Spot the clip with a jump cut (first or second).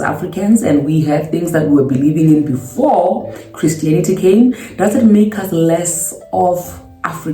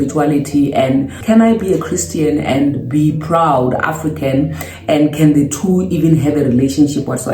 second